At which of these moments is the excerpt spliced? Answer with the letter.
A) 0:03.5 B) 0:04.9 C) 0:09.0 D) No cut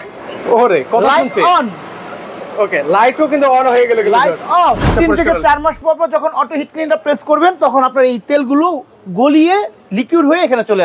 B